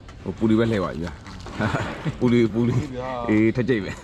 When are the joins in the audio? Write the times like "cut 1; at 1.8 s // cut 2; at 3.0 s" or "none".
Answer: none